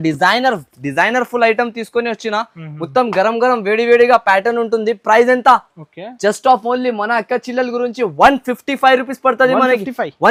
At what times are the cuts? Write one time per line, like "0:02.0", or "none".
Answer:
none